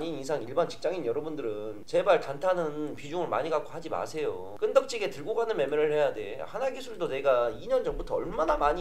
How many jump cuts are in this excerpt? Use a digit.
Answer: 0